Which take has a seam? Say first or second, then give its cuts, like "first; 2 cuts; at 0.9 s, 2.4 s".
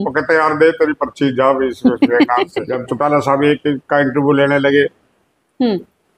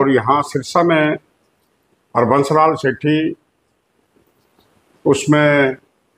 first; 1 cut; at 2.7 s